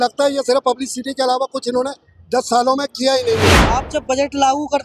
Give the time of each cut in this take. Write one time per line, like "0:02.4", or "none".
0:03.6